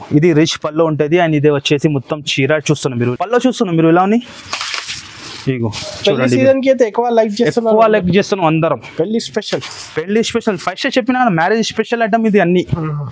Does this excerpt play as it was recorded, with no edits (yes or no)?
no